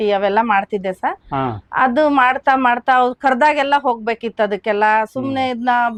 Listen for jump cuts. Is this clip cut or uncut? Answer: uncut